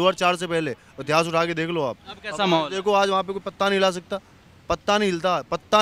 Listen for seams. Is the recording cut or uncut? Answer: uncut